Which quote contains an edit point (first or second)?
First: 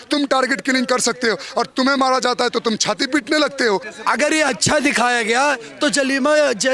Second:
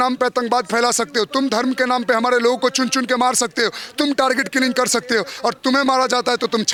first